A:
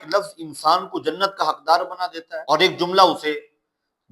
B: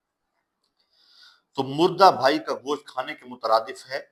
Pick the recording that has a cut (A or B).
A